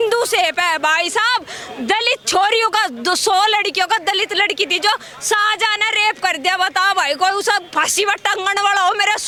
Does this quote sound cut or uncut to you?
uncut